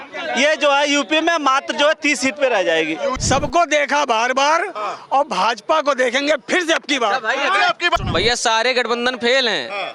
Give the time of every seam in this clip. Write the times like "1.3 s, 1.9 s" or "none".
3.2 s, 8.0 s